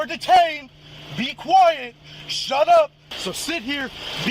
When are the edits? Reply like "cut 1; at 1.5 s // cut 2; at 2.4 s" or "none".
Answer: cut 1; at 3.1 s